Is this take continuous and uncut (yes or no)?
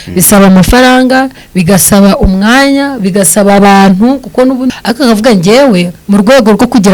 no